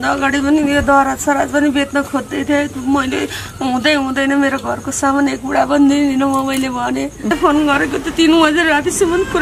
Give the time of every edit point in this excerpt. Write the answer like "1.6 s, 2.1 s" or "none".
7.3 s